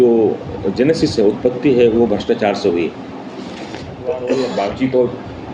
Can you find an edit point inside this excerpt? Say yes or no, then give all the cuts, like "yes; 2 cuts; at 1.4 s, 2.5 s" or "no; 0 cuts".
yes; 1 cut; at 4.3 s